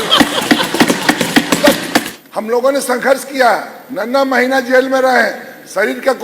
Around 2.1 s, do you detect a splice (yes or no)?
yes